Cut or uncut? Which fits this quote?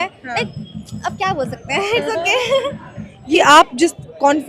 cut